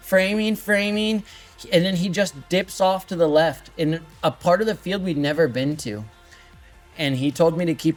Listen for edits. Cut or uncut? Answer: uncut